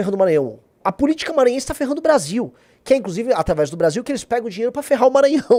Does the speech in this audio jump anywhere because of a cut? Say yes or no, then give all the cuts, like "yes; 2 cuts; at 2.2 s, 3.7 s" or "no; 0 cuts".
no; 0 cuts